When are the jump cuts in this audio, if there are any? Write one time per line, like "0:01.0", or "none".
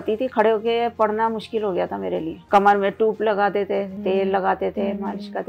0:02.4
0:03.9